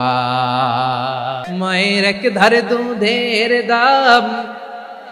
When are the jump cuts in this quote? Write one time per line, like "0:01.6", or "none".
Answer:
0:01.4